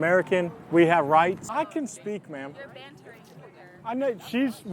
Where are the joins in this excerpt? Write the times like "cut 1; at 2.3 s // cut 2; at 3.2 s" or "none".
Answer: cut 1; at 1.4 s